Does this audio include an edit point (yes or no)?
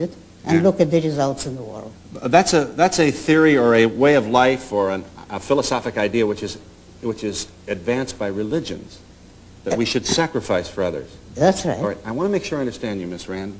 no